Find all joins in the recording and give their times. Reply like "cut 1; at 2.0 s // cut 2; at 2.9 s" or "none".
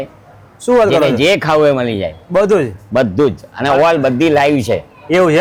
none